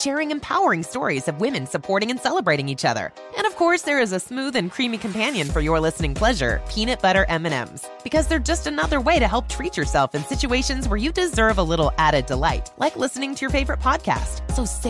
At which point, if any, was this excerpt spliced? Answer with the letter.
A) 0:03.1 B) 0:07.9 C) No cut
C